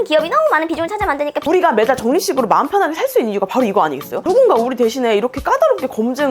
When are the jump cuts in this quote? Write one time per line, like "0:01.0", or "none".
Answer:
0:01.4